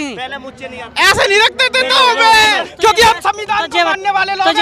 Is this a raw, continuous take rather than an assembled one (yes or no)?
no